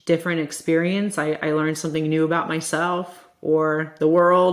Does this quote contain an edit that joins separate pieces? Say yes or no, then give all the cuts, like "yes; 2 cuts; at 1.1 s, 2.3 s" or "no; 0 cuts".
no; 0 cuts